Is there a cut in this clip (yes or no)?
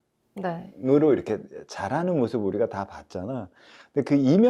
no